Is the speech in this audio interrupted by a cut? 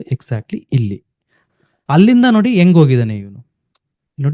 yes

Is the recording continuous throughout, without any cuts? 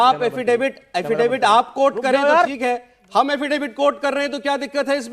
no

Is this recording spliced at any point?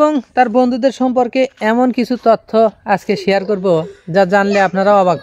no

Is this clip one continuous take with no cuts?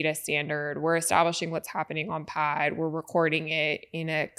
yes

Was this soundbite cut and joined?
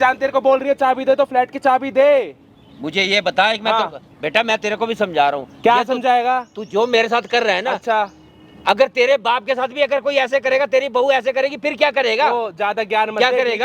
no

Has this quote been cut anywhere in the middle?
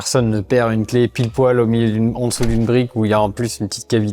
no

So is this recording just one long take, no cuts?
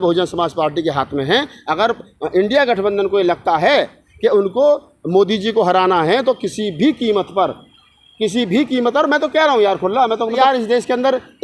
no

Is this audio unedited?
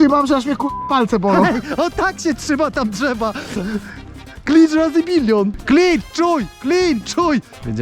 yes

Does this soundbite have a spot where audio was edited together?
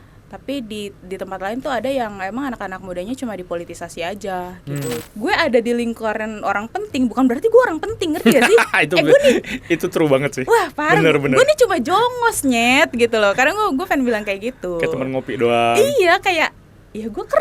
yes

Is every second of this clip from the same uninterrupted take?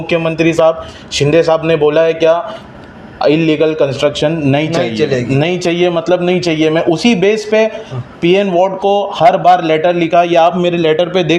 yes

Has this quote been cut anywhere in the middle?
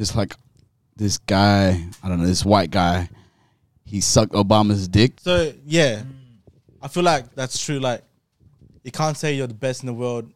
yes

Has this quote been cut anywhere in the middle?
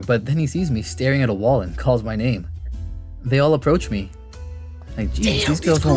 no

